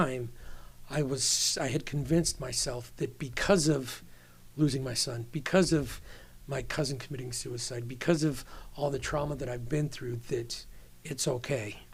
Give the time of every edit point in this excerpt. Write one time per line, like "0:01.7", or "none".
none